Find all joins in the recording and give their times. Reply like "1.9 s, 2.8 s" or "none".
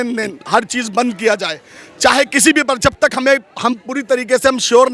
none